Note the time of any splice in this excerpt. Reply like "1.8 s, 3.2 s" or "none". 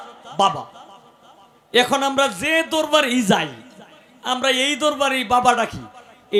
none